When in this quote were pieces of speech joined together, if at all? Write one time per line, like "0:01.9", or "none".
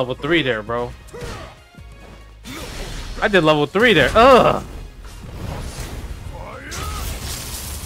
0:01.0

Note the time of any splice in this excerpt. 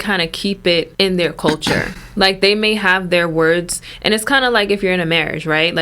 0:00.9

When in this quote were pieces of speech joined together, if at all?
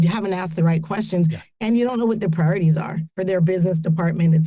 none

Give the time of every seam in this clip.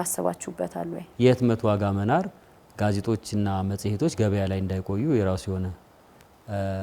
0:01.0

